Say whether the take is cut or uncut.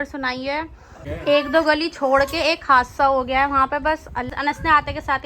cut